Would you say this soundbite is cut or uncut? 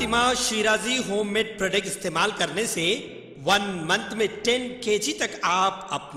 uncut